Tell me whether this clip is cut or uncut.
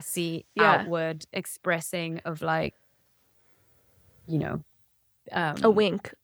uncut